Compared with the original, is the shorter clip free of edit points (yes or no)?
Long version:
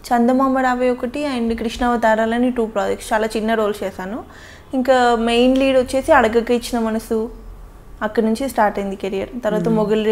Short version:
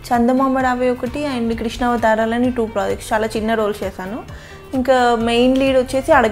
yes